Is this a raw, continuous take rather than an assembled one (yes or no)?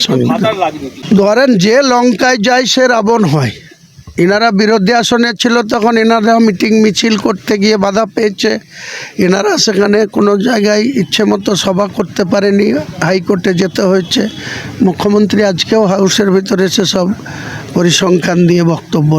no